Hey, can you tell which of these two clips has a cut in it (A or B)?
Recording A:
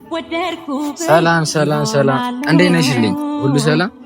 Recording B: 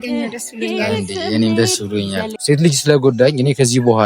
B